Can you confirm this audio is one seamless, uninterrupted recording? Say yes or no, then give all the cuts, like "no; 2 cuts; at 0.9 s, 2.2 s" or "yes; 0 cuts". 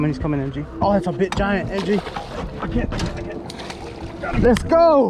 yes; 0 cuts